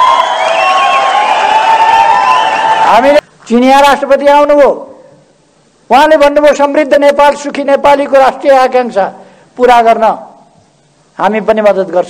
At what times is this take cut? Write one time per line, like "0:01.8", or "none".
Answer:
0:03.2